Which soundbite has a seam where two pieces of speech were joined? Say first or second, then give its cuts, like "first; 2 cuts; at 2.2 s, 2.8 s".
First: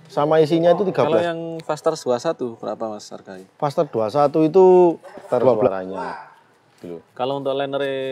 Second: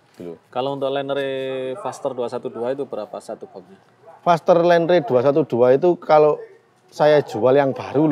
first; 2 cuts; at 1.1 s, 5.7 s